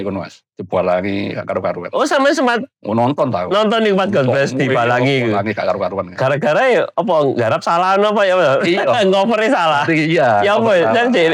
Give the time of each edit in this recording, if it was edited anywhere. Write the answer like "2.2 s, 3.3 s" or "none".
none